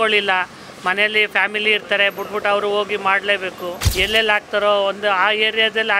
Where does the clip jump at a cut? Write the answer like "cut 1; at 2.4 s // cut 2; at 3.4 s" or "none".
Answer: cut 1; at 3.8 s